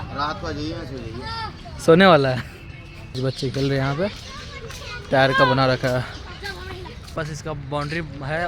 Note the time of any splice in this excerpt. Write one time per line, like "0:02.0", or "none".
0:03.2
0:07.1